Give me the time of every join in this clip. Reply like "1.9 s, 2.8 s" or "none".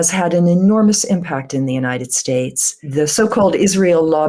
2.8 s

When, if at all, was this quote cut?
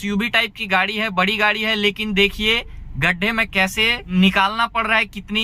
4.0 s

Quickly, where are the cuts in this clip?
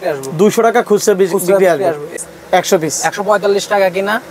2.1 s

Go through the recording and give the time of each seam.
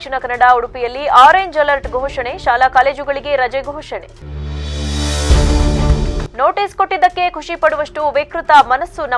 none

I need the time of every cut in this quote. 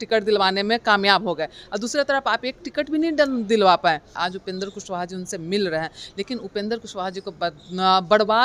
4.1 s

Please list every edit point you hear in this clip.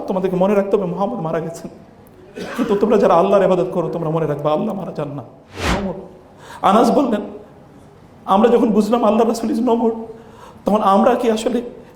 5.7 s

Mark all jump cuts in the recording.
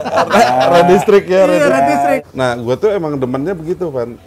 2.2 s

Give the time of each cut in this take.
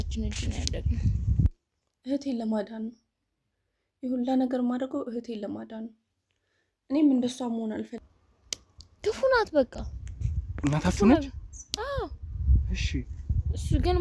1.4 s, 7.9 s

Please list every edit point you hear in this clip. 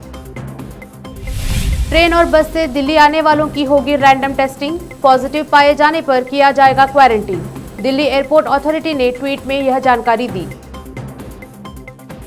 0.9 s

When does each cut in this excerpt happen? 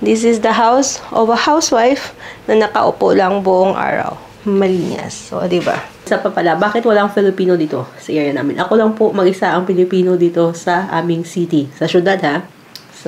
6.1 s

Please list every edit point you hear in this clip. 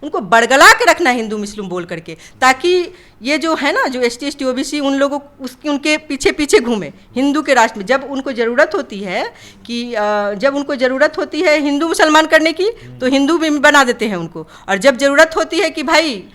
none

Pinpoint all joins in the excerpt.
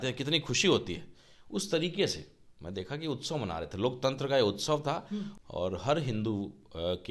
5.3 s

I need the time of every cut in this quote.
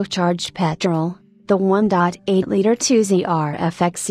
2.8 s

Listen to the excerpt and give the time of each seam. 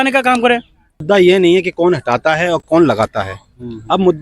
1.0 s

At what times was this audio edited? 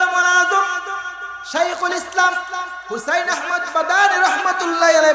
none

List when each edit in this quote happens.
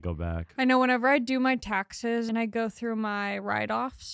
2.3 s

